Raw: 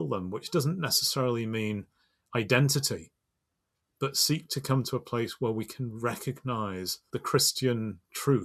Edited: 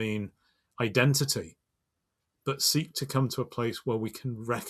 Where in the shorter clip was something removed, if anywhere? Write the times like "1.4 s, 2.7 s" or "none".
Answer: none